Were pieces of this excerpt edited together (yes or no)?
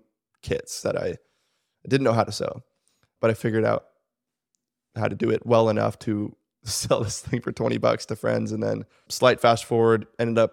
yes